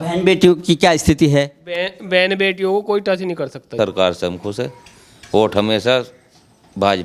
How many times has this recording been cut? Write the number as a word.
one